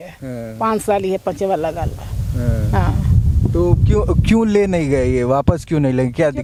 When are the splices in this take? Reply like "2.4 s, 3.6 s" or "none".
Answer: none

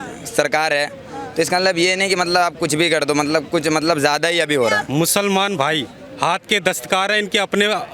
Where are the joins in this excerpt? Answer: 4.8 s

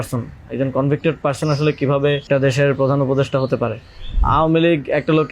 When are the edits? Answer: 2.2 s, 4.2 s

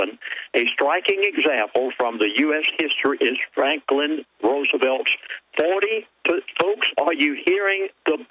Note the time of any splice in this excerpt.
1.1 s

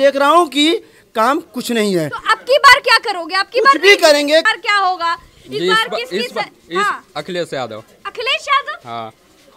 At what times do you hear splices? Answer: 4.5 s

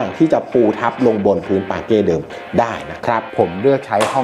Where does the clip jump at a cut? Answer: 3.3 s

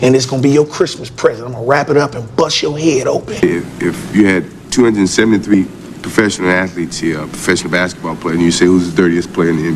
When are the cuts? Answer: 3.3 s

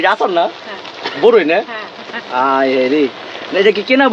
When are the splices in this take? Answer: none

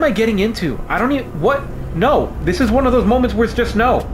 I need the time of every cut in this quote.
none

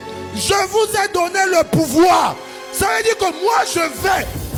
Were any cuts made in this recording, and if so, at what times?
none

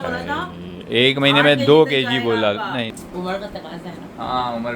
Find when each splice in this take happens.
2.9 s

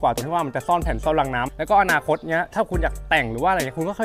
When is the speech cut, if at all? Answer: 1.4 s

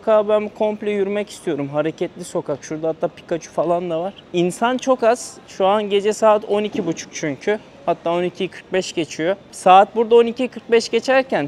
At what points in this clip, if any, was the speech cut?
none

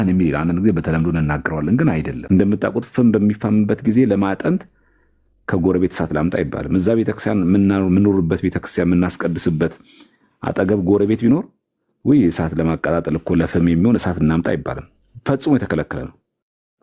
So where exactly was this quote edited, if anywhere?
2.2 s

